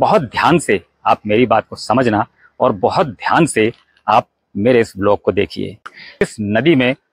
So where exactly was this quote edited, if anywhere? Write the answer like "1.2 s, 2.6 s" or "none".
6.2 s